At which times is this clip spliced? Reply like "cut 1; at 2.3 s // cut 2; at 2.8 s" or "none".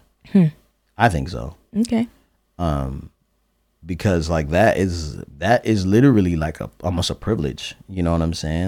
none